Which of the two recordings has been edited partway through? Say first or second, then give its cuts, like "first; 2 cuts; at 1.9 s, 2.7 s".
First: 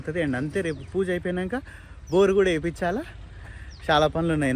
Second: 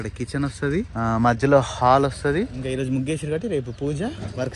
second; 2 cuts; at 0.9 s, 2.6 s